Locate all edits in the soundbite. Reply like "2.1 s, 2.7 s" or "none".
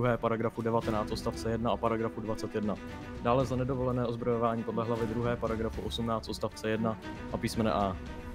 none